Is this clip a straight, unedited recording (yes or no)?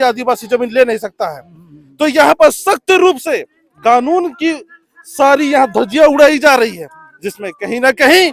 yes